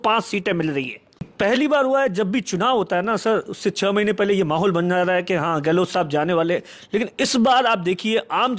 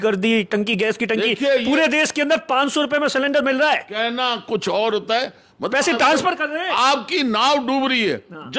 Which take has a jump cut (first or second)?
first